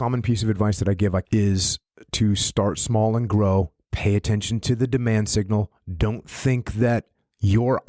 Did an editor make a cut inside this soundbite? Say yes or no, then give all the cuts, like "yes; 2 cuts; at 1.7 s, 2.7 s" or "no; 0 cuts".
yes; 1 cut; at 1.2 s